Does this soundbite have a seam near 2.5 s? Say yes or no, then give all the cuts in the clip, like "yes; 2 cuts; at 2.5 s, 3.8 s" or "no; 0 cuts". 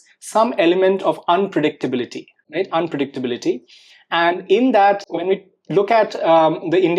no; 0 cuts